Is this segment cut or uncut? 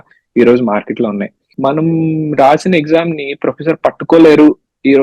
uncut